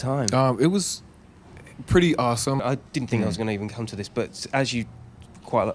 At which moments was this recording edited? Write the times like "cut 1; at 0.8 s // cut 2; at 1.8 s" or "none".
cut 1; at 2.6 s